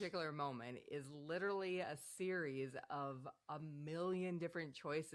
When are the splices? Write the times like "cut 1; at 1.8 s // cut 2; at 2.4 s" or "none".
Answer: none